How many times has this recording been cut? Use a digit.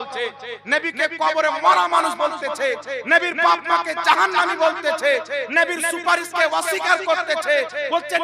0